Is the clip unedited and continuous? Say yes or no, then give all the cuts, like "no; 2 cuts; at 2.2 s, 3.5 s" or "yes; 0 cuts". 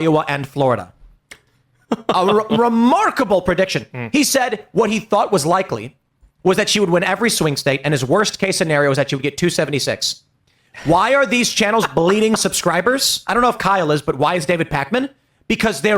no; 1 cut; at 8.4 s